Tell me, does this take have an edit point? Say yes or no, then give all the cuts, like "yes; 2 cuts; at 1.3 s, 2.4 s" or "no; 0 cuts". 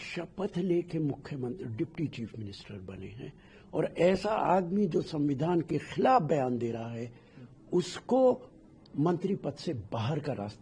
no; 0 cuts